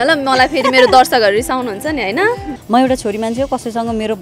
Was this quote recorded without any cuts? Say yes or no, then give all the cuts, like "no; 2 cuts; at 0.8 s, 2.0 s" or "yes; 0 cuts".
no; 1 cut; at 2.5 s